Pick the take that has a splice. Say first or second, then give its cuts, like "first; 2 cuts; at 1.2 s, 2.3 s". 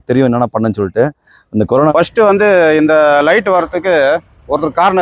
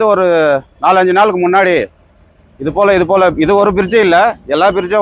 first; 1 cut; at 1.9 s